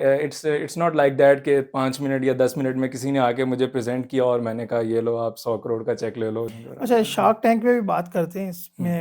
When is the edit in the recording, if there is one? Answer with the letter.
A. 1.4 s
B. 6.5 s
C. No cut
B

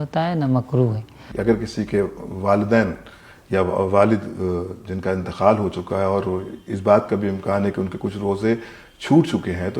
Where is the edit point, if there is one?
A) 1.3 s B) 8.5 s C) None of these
A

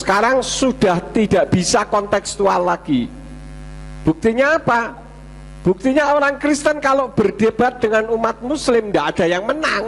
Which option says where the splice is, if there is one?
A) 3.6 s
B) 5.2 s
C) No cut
C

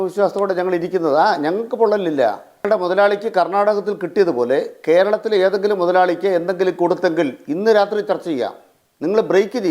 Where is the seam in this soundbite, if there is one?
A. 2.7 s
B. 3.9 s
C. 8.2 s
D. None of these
A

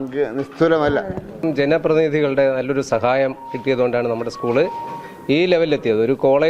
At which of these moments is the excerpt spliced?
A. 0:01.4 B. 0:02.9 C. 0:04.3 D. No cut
A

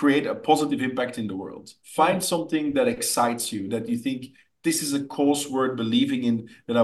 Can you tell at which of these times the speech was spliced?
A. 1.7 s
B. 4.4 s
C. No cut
A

